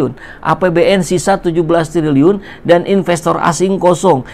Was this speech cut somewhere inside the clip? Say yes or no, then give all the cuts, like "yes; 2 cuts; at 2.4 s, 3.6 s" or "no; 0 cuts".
no; 0 cuts